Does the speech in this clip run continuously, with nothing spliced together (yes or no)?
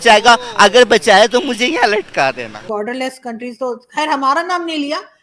no